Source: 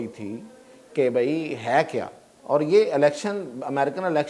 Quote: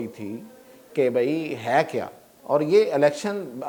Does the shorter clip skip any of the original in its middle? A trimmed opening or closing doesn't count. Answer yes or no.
no